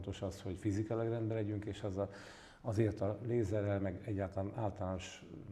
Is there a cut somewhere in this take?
no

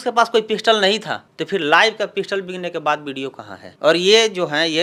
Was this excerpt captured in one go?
yes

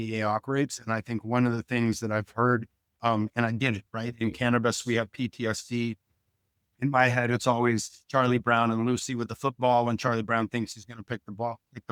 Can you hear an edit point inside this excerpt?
no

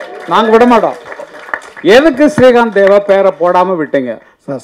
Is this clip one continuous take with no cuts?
yes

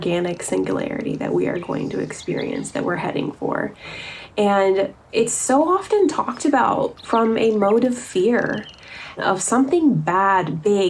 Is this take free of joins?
no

